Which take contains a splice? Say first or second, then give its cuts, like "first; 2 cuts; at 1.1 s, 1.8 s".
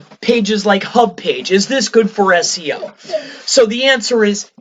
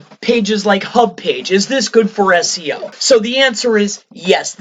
second; 1 cut; at 2.9 s